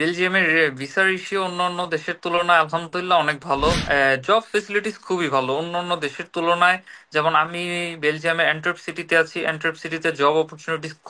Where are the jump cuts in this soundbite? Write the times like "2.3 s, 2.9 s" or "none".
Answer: 3.8 s

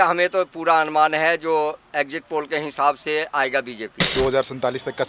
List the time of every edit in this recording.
4.1 s

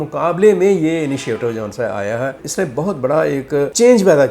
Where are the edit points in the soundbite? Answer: 2.4 s

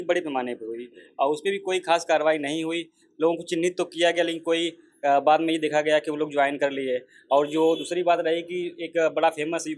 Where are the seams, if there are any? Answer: none

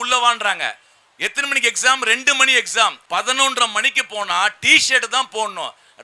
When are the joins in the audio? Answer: 3.0 s

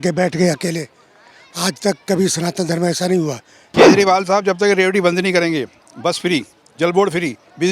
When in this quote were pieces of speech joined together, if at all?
3.9 s

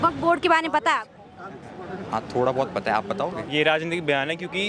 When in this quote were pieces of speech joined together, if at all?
3.4 s

